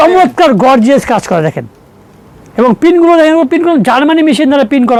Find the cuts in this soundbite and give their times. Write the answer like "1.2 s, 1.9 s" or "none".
none